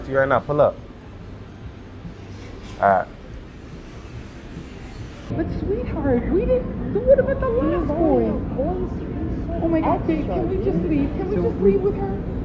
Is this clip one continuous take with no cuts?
no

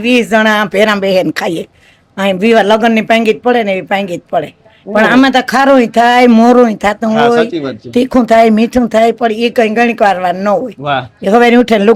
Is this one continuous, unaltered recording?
yes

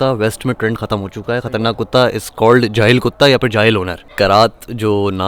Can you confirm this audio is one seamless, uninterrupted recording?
no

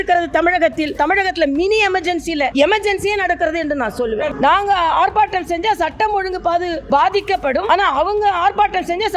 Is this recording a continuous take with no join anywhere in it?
no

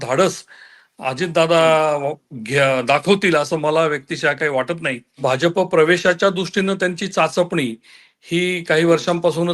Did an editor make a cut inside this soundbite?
yes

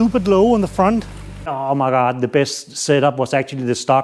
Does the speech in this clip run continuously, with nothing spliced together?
no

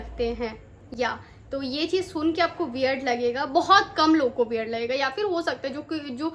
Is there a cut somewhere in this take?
no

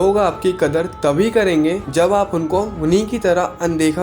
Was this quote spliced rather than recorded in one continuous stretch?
no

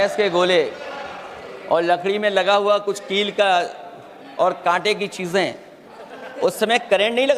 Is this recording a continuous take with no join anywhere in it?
yes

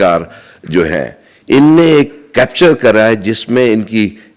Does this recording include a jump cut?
no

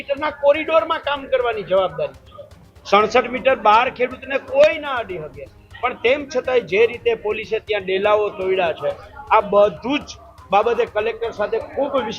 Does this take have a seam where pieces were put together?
no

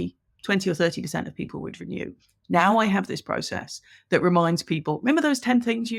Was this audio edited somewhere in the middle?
no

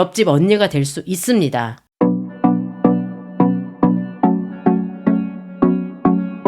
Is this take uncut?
no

